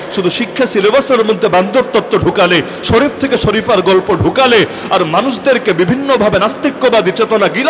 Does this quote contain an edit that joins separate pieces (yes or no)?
no